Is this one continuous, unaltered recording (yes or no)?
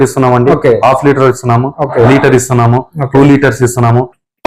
yes